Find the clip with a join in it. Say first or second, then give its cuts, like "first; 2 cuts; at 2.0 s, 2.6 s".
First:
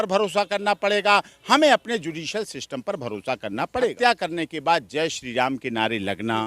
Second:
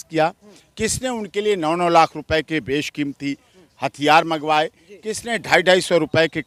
first; 1 cut; at 3.9 s